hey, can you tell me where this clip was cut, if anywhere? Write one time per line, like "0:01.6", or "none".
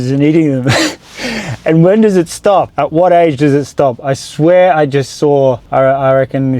0:02.7
0:05.6